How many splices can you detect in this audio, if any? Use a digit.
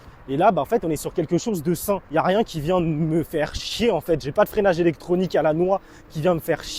1